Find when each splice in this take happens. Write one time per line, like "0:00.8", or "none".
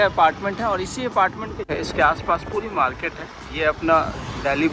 0:01.7